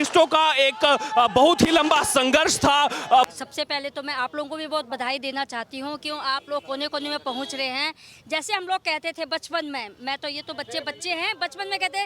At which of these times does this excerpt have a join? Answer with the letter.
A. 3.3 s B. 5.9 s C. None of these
A